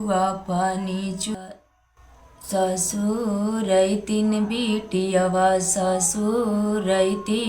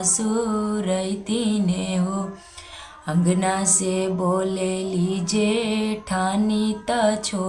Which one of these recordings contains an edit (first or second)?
first